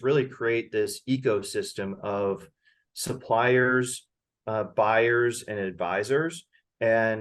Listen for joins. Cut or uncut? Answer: uncut